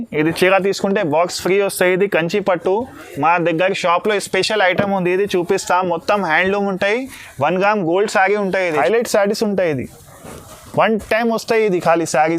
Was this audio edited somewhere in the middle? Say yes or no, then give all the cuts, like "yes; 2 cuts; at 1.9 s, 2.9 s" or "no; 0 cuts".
yes; 1 cut; at 8.8 s